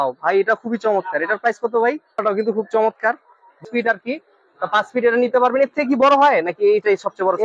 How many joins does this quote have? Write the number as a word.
two